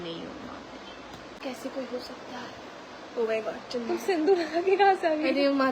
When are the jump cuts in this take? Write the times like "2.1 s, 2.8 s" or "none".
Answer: 1.4 s